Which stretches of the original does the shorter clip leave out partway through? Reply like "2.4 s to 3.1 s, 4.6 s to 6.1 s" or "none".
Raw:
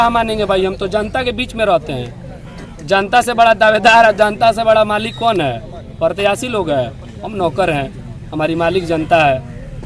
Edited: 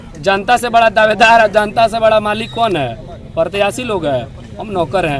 none